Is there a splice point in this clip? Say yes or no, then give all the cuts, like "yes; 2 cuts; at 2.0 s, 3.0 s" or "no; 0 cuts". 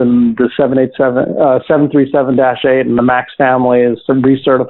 no; 0 cuts